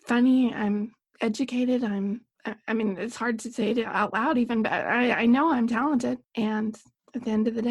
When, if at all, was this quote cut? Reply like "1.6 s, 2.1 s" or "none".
6.3 s